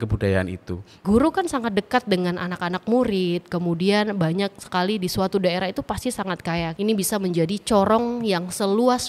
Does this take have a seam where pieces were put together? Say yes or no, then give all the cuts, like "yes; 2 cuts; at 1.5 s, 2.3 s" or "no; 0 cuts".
yes; 2 cuts; at 1.0 s, 6.7 s